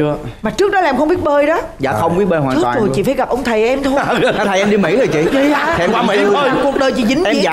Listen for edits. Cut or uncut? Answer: uncut